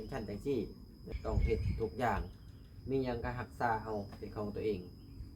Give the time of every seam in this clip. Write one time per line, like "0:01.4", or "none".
0:01.1